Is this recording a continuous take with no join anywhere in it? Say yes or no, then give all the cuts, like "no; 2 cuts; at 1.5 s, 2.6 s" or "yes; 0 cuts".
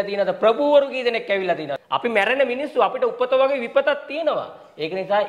no; 1 cut; at 1.7 s